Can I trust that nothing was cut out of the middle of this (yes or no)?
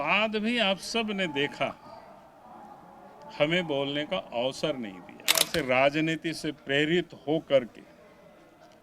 no